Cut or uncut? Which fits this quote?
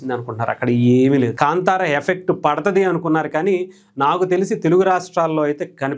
cut